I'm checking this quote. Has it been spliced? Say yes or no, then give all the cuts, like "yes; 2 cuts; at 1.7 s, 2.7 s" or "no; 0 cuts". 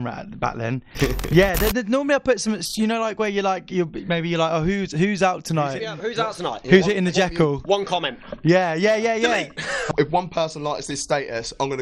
yes; 3 cuts; at 0.9 s, 6.0 s, 9.9 s